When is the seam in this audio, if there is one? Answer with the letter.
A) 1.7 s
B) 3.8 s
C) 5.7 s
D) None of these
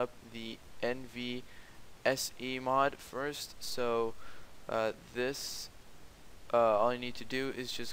D